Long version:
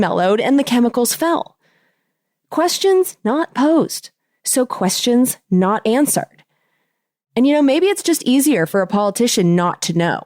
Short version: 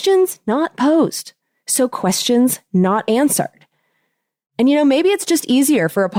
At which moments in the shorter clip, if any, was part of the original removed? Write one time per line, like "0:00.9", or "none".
none